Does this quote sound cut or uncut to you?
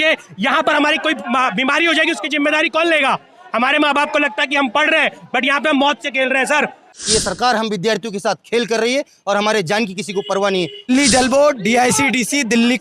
cut